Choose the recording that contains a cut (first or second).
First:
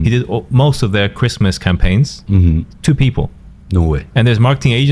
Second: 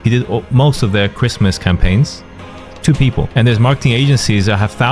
second